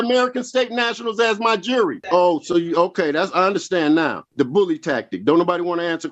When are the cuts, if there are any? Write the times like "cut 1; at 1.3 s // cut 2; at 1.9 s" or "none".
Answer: cut 1; at 2.0 s // cut 2; at 4.2 s

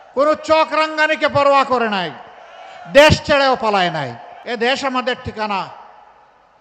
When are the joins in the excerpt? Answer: cut 1; at 4.3 s

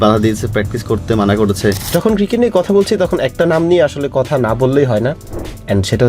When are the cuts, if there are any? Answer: cut 1; at 1.9 s

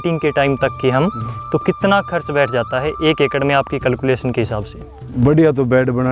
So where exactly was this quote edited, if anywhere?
cut 1; at 5.0 s

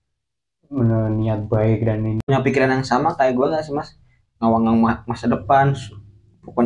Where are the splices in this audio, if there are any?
cut 1; at 2.3 s

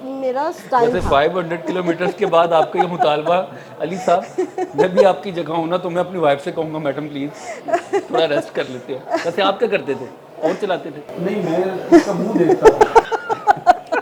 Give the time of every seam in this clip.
none

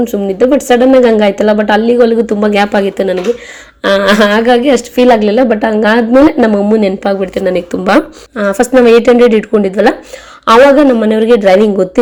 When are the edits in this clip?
none

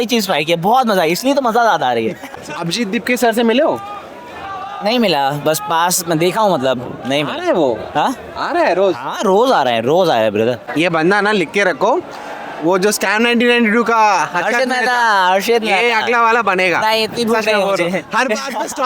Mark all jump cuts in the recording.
cut 1; at 2.4 s // cut 2; at 10.6 s

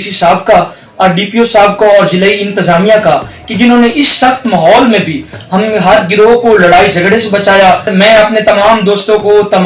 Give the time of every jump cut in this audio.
cut 1; at 7.9 s

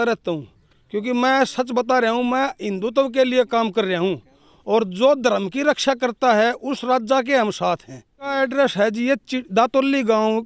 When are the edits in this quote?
cut 1; at 8.3 s

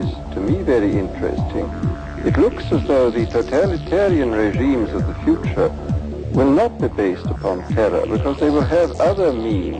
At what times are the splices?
none

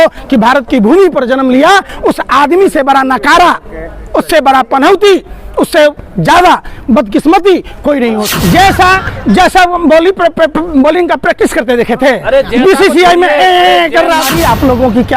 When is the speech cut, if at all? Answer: cut 1; at 8.3 s // cut 2; at 14.2 s

